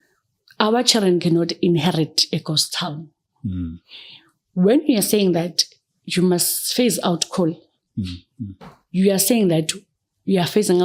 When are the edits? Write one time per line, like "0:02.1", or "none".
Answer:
none